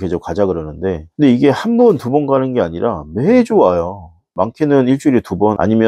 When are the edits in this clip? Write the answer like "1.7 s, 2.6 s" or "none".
1.0 s